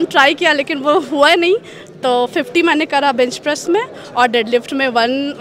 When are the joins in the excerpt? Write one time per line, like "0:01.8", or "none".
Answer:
none